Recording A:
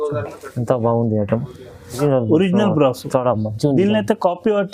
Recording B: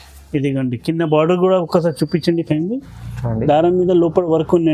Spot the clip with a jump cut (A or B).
A